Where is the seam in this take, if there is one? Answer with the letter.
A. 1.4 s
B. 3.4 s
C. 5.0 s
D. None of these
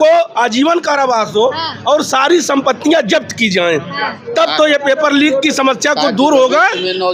D